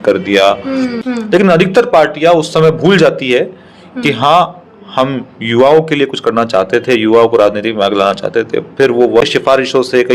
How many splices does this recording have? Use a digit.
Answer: 2